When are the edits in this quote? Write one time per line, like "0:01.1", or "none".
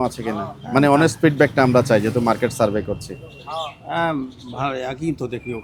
none